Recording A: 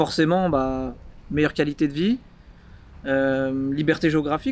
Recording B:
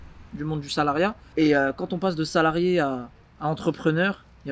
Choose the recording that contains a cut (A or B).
B